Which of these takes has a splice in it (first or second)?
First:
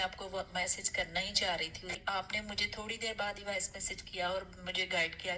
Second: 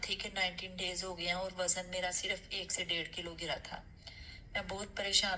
first